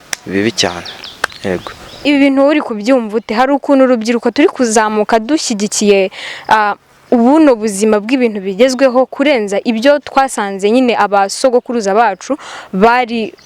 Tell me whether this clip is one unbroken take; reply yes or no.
no